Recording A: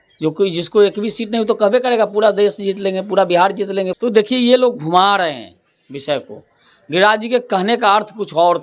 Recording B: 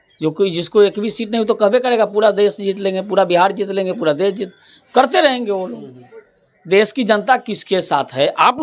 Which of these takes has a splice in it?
A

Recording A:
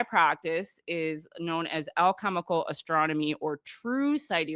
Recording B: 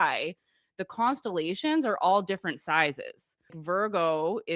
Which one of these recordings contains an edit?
B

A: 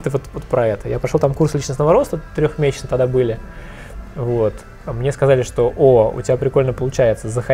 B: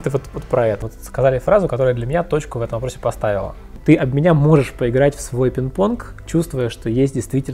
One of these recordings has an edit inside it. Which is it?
B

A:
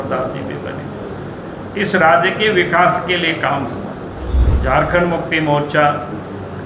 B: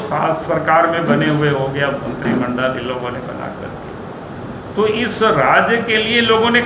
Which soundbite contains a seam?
A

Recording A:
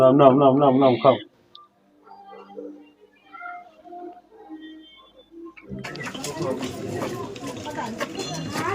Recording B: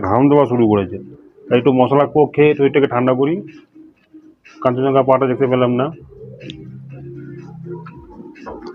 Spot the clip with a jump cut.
A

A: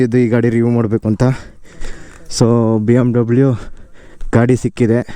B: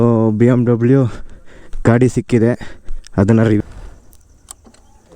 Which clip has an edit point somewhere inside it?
B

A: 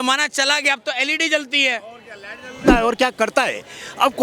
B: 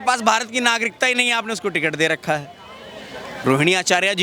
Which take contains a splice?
A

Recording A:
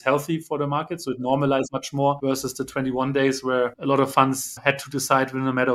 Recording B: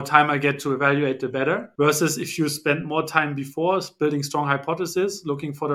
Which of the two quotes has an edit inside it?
A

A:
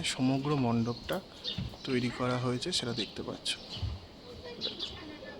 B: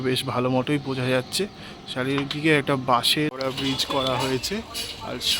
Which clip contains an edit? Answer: B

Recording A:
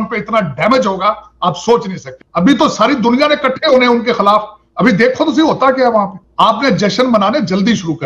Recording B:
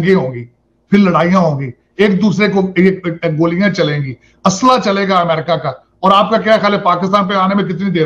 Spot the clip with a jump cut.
A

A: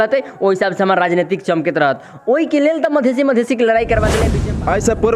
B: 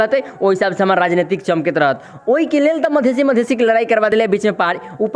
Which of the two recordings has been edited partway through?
A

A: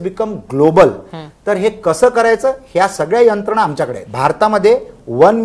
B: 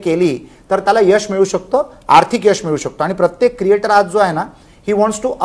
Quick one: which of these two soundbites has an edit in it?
A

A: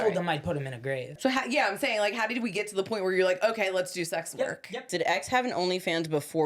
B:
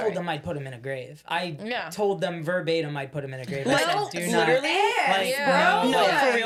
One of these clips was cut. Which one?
A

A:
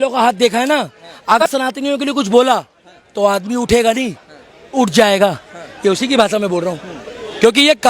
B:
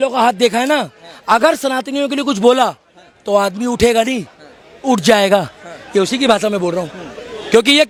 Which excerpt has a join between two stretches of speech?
A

